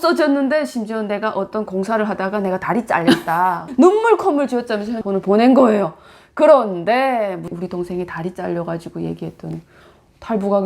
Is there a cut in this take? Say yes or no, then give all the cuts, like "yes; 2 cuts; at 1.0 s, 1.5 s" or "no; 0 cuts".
yes; 4 cuts; at 3.6 s, 4.9 s, 7.5 s, 9.7 s